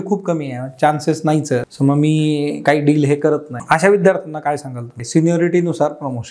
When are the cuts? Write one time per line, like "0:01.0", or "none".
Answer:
0:01.7
0:03.6
0:04.9